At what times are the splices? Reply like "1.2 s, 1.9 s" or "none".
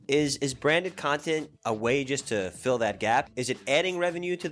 1.5 s, 3.3 s

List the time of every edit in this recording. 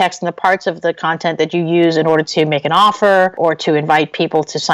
3.3 s

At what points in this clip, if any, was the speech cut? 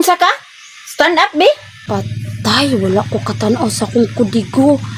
1.7 s

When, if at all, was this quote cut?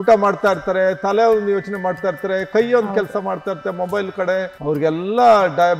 4.5 s

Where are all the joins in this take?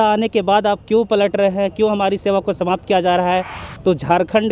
3.6 s

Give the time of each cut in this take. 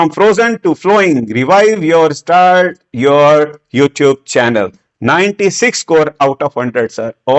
none

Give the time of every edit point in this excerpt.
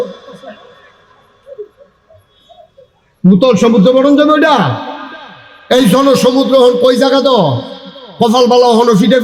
none

